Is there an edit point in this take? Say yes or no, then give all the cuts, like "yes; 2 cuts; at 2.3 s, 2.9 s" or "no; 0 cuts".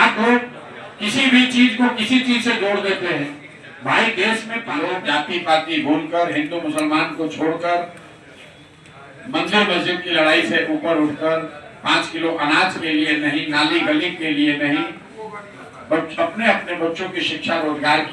yes; 1 cut; at 4.6 s